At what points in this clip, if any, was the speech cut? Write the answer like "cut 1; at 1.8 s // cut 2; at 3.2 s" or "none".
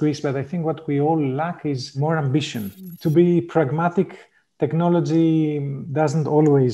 cut 1; at 2.7 s // cut 2; at 5.8 s

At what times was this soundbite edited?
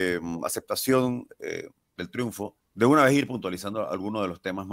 cut 1; at 1.8 s // cut 2; at 2.6 s

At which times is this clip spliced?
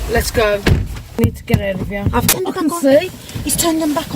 cut 1; at 1.1 s // cut 2; at 2.3 s

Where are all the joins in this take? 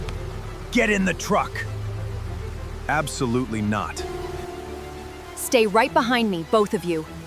cut 1; at 4.0 s

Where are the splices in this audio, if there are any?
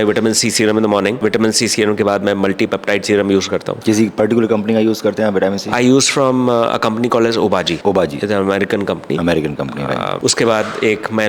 none

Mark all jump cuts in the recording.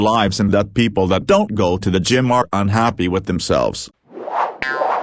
cut 1; at 4.0 s

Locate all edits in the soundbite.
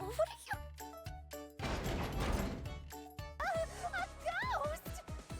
cut 1; at 3.4 s

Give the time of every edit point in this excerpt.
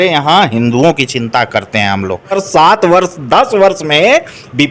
cut 1; at 2.4 s

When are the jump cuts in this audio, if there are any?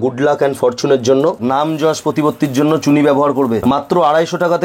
cut 1; at 1.4 s // cut 2; at 3.6 s

